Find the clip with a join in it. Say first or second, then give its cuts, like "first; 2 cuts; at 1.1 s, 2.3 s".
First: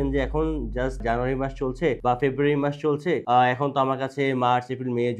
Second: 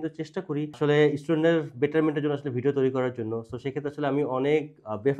first; 3 cuts; at 1.0 s, 2.0 s, 3.2 s